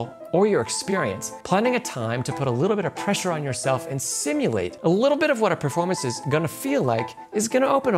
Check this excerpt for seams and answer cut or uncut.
cut